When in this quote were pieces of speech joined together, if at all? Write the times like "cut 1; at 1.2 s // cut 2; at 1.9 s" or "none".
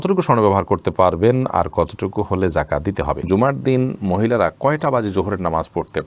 cut 1; at 3.2 s